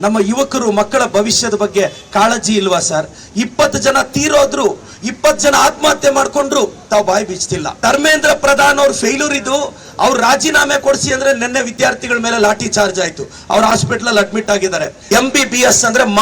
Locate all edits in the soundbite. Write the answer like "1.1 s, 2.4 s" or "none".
7.7 s, 14.9 s

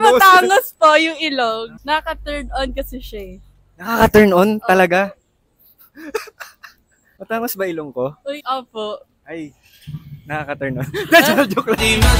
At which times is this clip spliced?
none

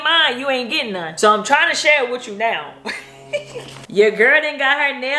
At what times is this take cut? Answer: 1.1 s, 3.8 s

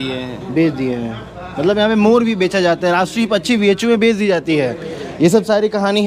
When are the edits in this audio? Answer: none

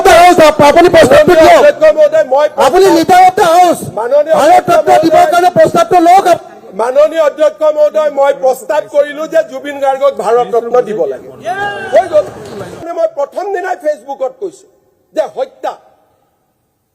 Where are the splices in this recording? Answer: 12.9 s

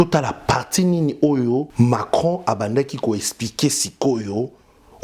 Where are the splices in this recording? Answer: 1.7 s

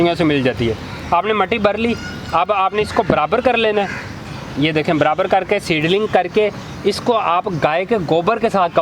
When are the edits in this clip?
none

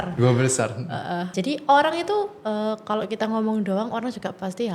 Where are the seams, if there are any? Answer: 1.3 s

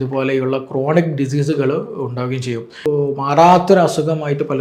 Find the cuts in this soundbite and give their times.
2.8 s

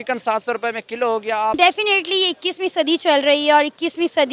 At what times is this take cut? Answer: 1.5 s

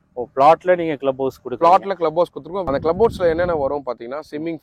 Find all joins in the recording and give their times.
2.6 s

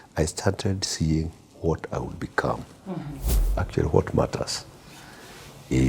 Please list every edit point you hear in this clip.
3.3 s

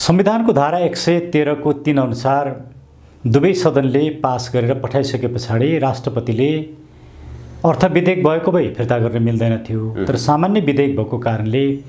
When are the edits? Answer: none

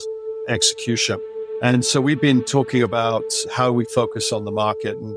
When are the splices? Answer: 1.4 s, 3.4 s

